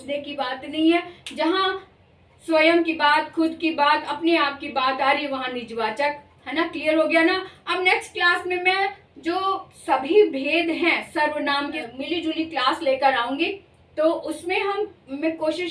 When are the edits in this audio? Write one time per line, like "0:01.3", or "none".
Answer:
0:11.8